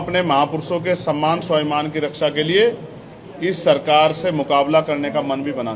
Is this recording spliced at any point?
no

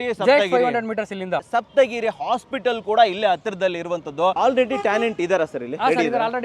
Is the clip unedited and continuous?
no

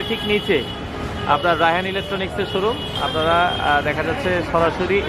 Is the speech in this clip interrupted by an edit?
no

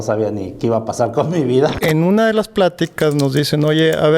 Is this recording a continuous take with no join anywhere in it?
no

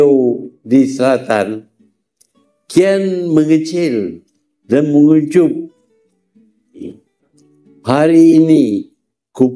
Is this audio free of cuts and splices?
no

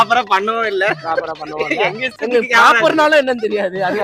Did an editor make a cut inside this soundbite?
no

